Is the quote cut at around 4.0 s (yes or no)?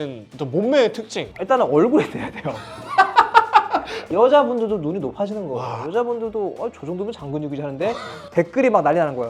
yes